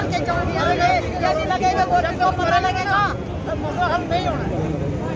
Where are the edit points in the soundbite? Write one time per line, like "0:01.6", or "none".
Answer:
none